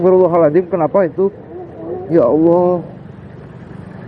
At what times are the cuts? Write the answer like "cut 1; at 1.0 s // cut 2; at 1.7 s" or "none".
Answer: cut 1; at 2.8 s